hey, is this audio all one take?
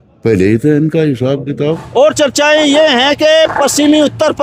no; 1 cut; at 1.8 s

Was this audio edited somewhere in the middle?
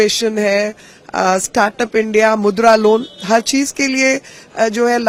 no; 0 cuts

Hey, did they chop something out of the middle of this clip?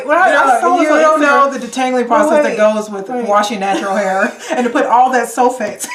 no; 0 cuts

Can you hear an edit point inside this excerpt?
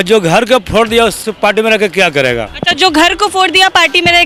no; 0 cuts

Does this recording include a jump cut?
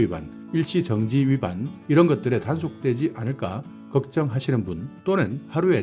no; 0 cuts

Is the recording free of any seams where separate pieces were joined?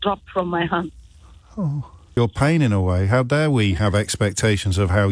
no; 1 cut; at 2.0 s

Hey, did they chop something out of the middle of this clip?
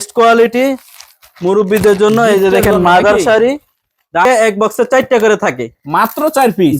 yes; 1 cut; at 4.2 s

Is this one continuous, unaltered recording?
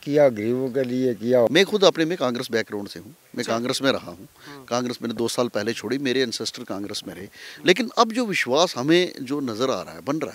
no; 1 cut; at 1.5 s

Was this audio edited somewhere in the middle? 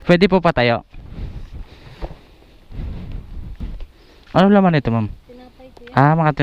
yes; 1 cut; at 1.8 s

